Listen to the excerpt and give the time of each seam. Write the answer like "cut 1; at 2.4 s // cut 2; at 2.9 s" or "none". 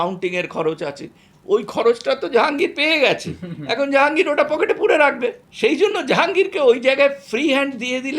cut 1; at 5.4 s